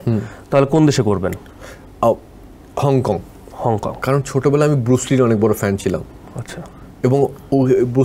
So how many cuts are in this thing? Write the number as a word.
zero